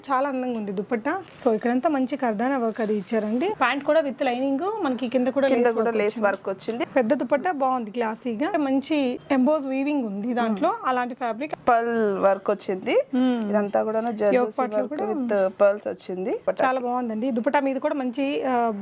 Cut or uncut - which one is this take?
cut